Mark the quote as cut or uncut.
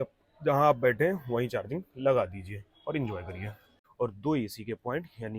cut